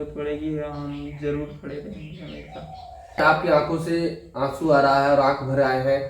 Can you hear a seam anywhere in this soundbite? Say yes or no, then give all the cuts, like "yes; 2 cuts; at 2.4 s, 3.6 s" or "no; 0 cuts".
yes; 1 cut; at 3.2 s